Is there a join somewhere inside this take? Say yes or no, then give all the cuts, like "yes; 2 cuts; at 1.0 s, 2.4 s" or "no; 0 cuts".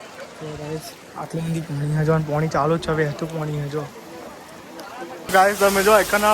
yes; 1 cut; at 5.3 s